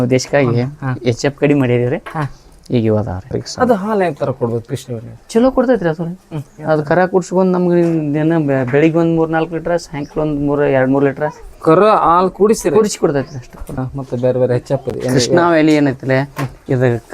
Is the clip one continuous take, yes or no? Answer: no